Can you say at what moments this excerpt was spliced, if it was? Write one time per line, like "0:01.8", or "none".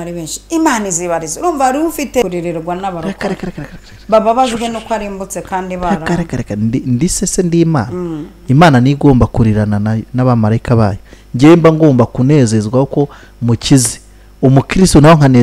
0:02.2

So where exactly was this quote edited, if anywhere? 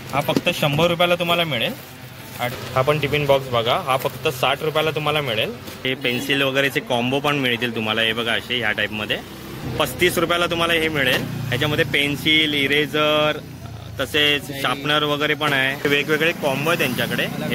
0:02.6
0:05.8
0:09.6
0:15.8

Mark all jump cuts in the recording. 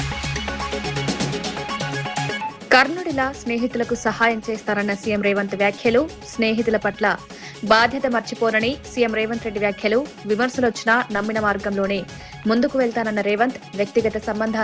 0:01.9

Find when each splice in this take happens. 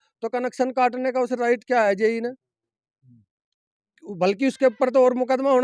none

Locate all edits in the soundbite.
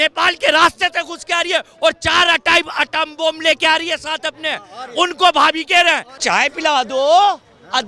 0:06.1

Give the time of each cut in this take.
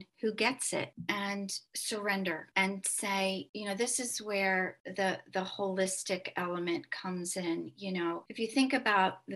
none

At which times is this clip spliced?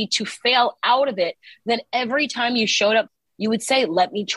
0:03.2

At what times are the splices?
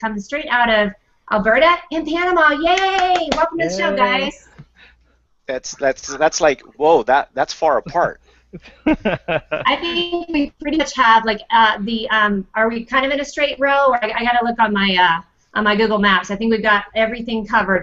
none

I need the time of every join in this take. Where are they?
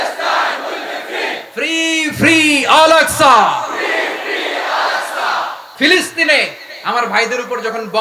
0:05.6

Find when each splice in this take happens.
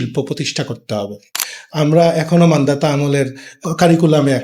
0:01.3
0:03.5

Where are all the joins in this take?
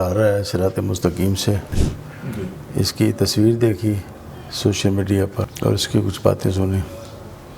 0:01.8
0:05.5

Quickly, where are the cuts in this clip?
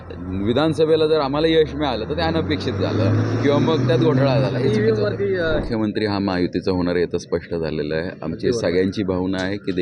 0:05.6

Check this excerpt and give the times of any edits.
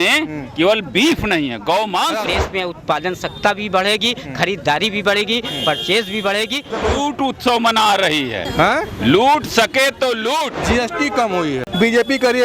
0:02.3
0:06.8
0:10.6
0:11.7

